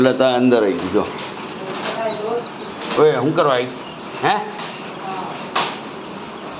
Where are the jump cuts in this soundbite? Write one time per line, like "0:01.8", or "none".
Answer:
none